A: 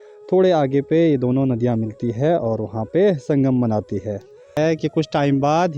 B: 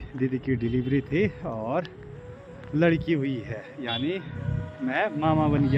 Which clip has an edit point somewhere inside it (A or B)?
A